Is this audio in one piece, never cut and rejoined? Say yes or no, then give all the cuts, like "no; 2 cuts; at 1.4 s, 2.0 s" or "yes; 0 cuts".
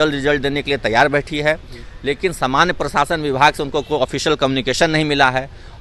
yes; 0 cuts